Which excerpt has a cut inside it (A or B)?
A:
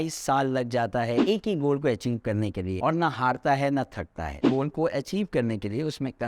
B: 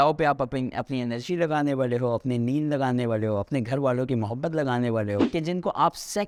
A